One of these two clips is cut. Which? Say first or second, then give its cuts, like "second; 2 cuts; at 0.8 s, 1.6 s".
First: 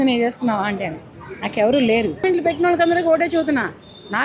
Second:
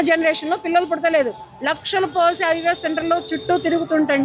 first; 1 cut; at 2.2 s